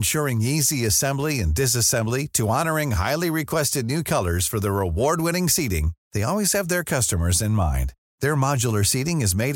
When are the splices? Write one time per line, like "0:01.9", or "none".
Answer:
none